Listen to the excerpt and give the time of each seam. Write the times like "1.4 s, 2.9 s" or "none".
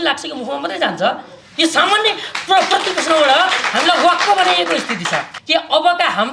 5.3 s